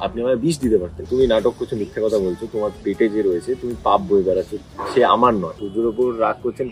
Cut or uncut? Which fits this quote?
cut